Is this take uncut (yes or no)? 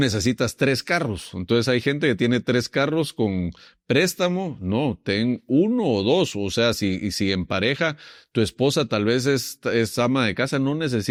yes